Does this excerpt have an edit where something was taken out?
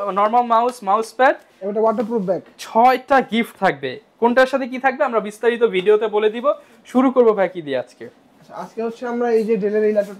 no; 0 cuts

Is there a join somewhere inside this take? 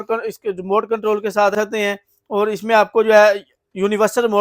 yes; 1 cut; at 1.5 s

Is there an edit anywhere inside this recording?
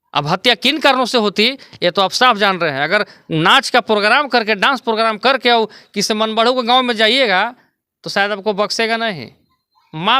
no; 0 cuts

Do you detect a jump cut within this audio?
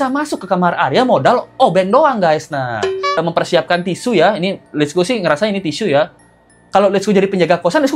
yes; 2 cuts; at 3.2 s, 6.2 s

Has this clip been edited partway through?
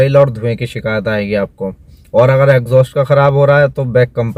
no; 0 cuts

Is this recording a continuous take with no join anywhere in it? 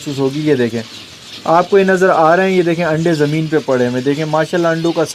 yes; 0 cuts

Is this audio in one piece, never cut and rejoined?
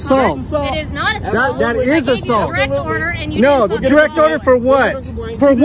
yes; 0 cuts

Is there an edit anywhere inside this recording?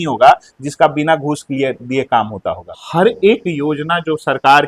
yes; 1 cut; at 2.7 s

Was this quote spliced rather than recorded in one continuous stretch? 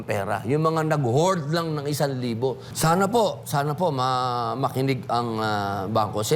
yes; 1 cut; at 2.7 s

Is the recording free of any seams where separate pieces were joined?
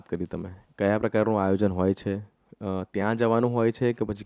yes; 0 cuts

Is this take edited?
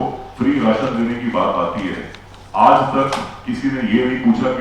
no; 0 cuts

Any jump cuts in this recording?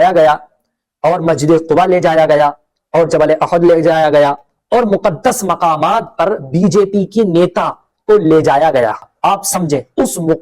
yes; 1 cut; at 9.1 s

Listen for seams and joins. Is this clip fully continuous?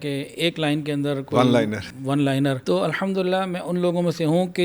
no; 1 cut; at 2.6 s

